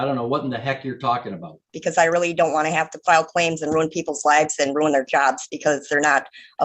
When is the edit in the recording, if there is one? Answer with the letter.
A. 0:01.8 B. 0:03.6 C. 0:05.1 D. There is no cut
A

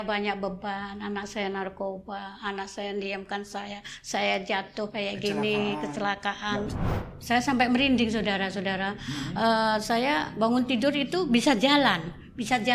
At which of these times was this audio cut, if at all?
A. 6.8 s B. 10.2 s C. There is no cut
A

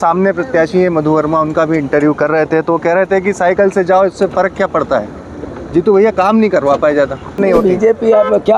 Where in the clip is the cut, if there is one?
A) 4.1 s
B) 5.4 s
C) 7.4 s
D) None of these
C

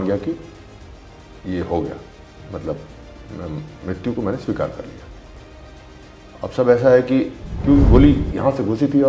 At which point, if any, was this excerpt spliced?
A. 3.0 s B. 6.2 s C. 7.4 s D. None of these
C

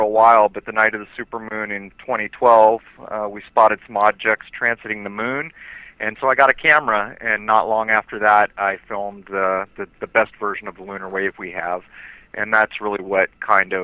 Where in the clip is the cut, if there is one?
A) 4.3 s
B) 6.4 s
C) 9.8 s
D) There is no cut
A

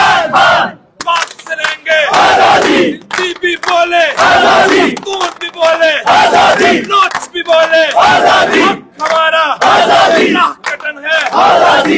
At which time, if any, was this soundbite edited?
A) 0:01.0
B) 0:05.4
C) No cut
A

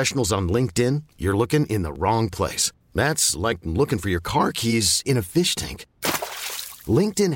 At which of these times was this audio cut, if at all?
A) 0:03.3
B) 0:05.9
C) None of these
C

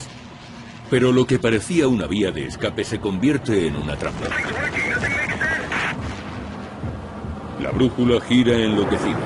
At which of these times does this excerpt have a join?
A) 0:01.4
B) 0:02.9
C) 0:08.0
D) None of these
C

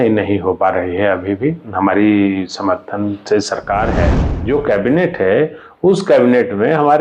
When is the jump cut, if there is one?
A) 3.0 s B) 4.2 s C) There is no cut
B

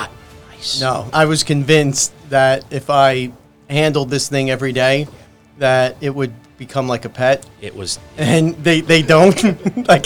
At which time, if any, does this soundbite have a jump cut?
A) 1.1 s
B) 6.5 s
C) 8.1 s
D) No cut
A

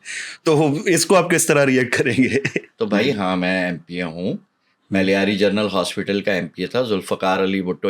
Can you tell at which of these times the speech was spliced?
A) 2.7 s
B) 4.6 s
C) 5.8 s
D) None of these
A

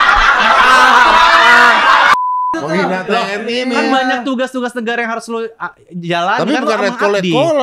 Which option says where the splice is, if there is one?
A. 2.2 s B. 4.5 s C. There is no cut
A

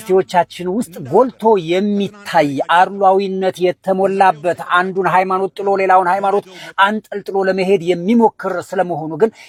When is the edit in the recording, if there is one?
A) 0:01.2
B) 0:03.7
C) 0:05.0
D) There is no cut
D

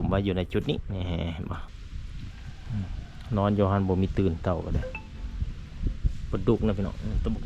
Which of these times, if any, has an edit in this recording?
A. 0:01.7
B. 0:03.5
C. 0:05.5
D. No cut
A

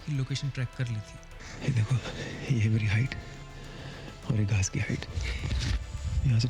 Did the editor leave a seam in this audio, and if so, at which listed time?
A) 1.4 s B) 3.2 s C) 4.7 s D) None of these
A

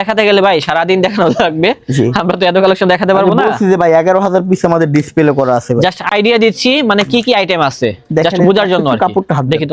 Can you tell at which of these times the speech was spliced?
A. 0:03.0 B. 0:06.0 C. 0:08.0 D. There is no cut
D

